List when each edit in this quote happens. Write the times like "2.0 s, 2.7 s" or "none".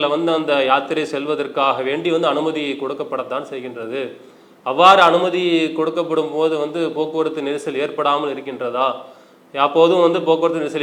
none